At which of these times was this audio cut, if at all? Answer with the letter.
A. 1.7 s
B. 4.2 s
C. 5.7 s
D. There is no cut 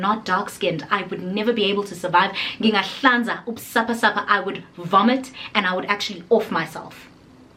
D